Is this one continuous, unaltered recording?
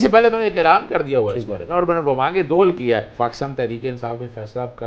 no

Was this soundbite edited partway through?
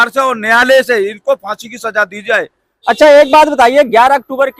no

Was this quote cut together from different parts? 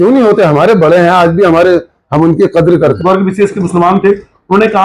yes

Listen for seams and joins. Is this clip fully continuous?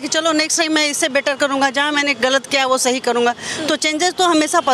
yes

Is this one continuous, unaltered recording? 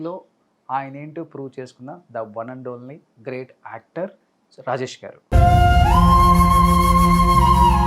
yes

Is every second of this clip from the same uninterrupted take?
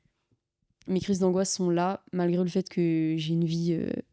yes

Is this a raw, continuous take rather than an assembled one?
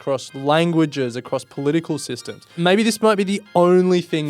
no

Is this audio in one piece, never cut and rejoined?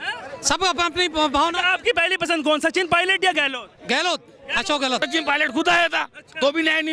no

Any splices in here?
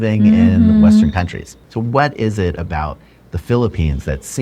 yes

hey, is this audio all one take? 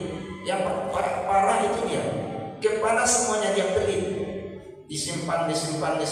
yes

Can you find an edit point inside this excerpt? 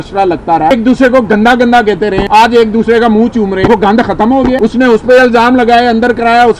yes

